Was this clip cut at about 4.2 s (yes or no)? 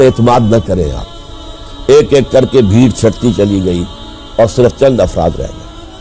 no